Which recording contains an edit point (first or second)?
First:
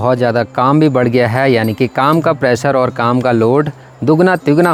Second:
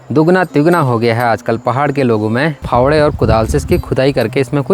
second